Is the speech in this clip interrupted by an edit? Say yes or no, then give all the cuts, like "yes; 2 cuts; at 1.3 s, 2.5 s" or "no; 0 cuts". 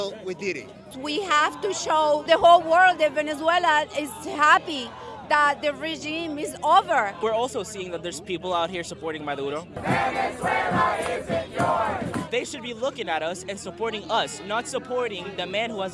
no; 0 cuts